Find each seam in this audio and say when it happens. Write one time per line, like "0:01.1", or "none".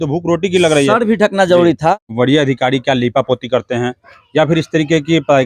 0:02.1